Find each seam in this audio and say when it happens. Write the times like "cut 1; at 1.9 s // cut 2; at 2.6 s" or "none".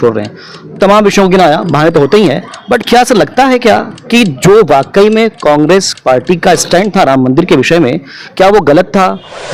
none